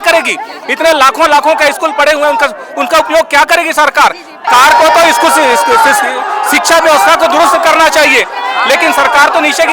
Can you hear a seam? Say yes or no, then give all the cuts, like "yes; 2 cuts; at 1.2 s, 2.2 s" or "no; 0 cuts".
yes; 1 cut; at 4.5 s